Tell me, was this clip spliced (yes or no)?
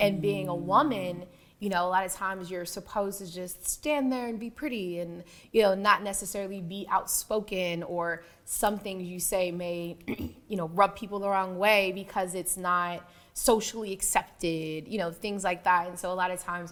no